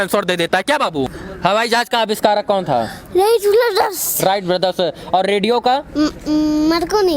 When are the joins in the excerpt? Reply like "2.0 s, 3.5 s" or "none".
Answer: 1.2 s